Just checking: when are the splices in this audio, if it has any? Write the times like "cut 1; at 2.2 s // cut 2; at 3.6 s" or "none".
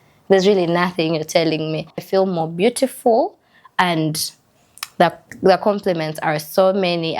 cut 1; at 2.0 s